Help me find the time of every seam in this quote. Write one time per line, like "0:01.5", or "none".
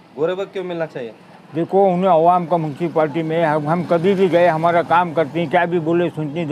none